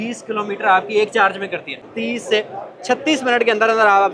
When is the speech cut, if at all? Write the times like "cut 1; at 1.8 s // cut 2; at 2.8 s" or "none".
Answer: cut 1; at 1.9 s